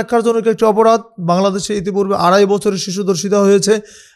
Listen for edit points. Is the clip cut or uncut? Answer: uncut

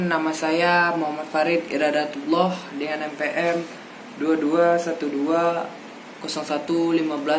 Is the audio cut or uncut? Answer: uncut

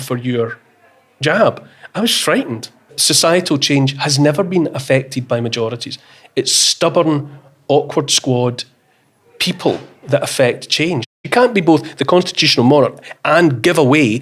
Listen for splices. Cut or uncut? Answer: cut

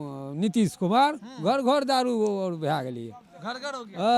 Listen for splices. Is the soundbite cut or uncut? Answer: uncut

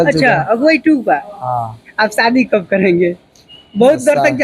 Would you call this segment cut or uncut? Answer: cut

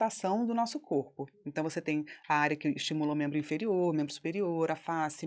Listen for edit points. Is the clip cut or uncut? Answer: uncut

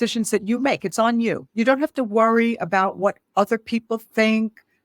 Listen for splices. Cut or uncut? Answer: cut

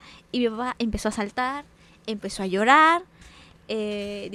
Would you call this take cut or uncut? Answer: uncut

